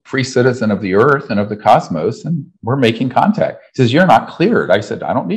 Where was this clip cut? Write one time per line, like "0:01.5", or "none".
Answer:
none